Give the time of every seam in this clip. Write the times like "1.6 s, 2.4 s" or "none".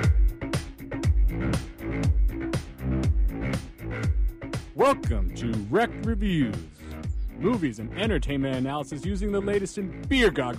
none